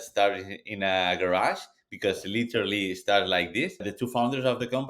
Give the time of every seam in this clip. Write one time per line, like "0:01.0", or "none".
0:04.0